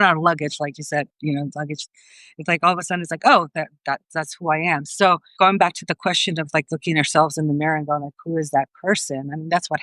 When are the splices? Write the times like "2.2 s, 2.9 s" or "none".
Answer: 5.3 s